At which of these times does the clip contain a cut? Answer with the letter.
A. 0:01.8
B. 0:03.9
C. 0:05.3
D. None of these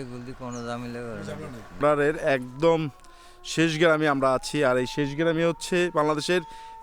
A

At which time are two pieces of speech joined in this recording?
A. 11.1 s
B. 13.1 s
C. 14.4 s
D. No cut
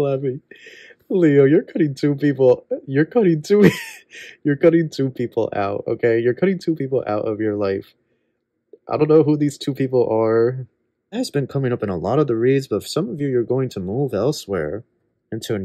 A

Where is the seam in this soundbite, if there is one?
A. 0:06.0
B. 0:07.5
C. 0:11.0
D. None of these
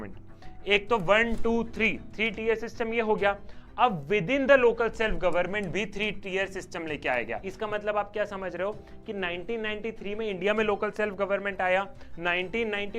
B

